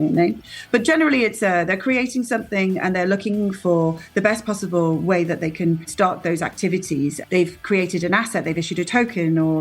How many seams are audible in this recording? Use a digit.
2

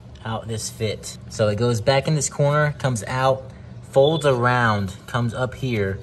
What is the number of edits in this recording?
1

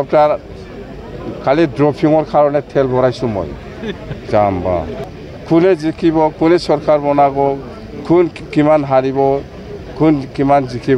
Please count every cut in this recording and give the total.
1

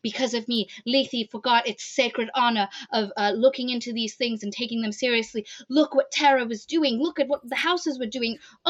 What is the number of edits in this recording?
0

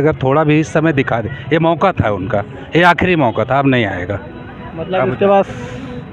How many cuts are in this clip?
0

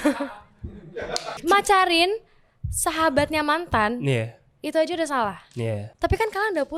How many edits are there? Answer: 2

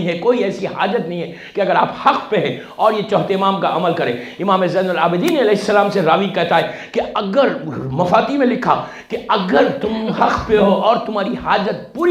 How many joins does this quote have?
0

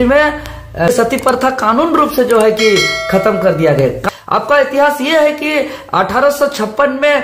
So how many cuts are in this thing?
2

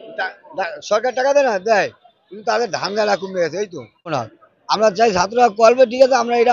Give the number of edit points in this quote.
1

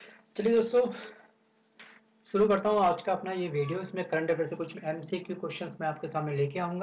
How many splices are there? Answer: 1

